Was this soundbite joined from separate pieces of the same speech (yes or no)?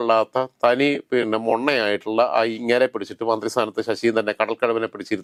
no